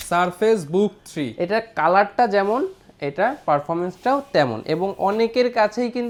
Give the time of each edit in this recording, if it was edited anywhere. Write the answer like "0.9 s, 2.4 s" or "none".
none